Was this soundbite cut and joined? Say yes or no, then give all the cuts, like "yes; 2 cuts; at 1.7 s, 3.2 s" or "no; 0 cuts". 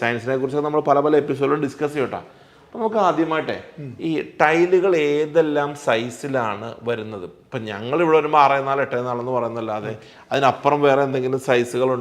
no; 0 cuts